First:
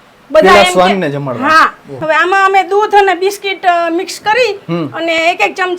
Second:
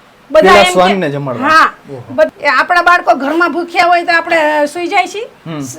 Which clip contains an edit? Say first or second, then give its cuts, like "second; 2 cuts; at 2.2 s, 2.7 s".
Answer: first; 1 cut; at 1.9 s